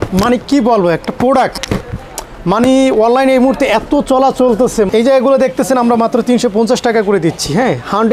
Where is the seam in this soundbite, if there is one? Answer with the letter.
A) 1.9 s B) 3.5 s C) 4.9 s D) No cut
C